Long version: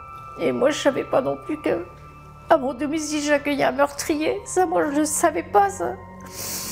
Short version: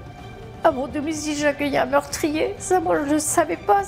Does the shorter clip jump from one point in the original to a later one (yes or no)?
no